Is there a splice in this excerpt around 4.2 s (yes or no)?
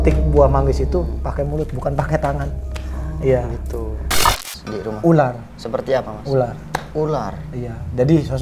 yes